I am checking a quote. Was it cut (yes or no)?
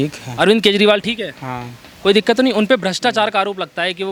no